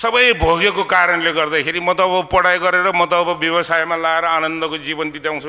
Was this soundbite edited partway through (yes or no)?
no